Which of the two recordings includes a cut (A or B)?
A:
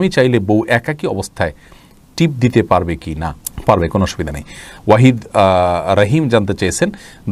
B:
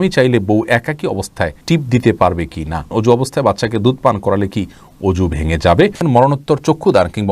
B